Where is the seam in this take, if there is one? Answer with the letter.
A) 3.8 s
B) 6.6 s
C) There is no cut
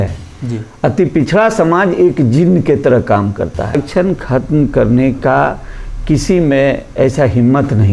A